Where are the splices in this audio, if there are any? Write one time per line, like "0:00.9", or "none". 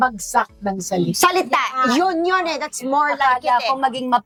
none